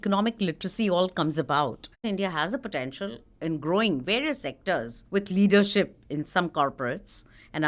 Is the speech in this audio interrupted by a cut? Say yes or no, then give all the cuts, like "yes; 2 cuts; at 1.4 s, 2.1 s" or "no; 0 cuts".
yes; 2 cuts; at 2.0 s, 5.0 s